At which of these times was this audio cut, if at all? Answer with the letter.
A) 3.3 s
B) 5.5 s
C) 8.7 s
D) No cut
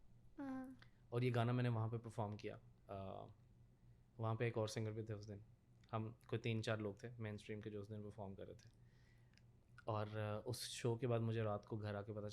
D